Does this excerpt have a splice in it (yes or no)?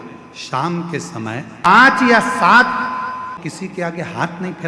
yes